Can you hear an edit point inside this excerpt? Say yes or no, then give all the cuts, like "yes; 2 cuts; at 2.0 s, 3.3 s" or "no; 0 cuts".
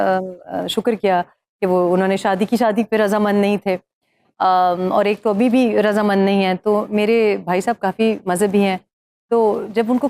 no; 0 cuts